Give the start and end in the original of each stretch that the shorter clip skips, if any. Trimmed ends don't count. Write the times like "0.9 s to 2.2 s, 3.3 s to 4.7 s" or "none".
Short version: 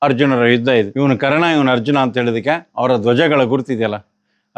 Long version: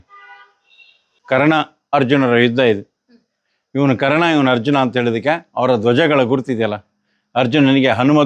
2.8 s to 3.7 s